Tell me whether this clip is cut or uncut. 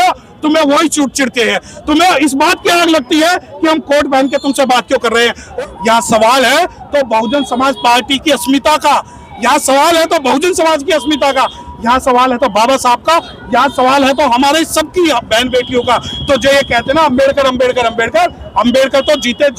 cut